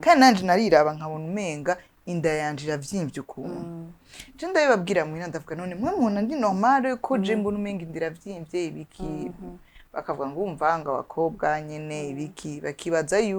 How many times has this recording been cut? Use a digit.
0